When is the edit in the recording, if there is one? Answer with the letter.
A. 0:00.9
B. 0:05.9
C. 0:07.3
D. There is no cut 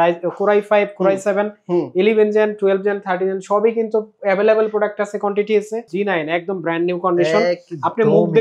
B